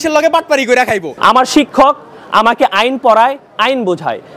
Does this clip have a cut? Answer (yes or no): yes